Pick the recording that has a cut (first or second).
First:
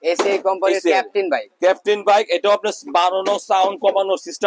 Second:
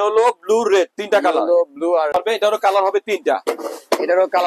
second